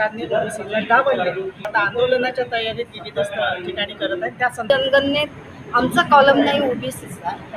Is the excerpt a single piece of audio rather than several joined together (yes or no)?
no